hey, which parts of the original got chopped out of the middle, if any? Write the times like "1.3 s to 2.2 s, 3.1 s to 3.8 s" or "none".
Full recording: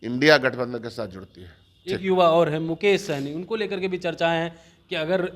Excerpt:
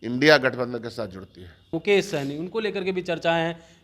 1.7 s to 2.7 s